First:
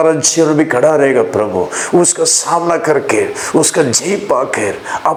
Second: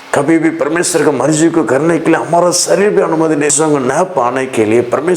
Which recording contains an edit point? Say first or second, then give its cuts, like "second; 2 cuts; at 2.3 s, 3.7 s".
second; 1 cut; at 3.5 s